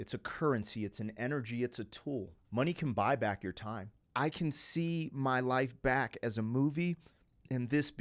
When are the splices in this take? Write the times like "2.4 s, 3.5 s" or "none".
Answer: 2.4 s, 3.9 s